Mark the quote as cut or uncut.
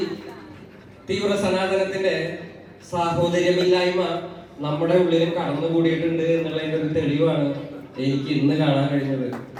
uncut